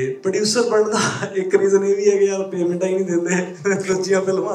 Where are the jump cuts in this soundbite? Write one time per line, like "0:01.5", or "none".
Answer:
none

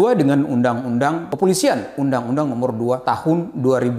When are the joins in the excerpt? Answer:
0:01.3
0:03.0

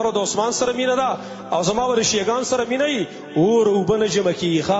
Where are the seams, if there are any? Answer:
none

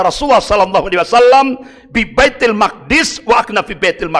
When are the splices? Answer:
none

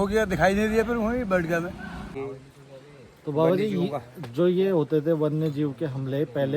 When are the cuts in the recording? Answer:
0:02.1

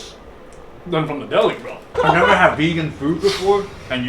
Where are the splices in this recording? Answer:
0:01.9

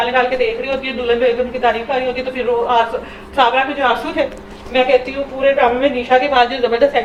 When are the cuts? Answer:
none

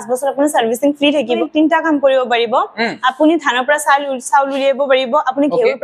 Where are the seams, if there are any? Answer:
0:01.4

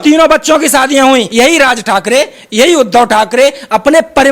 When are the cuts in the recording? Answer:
0:01.3

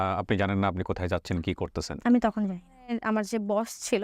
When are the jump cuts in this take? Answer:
0:03.0

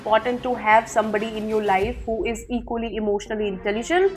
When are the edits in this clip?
none

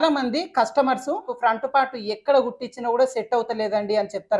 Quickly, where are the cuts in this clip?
0:01.3

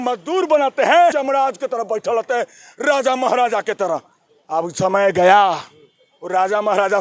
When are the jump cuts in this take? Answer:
0:01.2

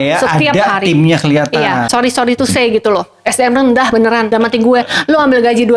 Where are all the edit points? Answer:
0:01.9

